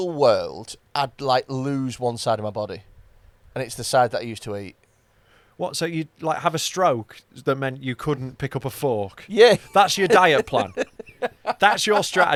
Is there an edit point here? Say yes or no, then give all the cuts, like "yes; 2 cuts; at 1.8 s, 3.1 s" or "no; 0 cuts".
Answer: no; 0 cuts